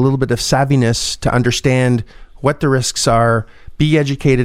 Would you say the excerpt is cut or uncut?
uncut